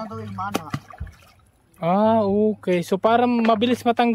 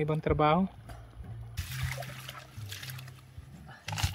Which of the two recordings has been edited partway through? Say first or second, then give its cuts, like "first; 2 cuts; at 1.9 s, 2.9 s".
second; 1 cut; at 1.7 s